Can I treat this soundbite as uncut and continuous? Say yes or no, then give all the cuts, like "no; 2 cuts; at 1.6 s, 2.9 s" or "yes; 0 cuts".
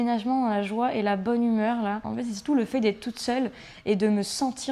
no; 1 cut; at 2.1 s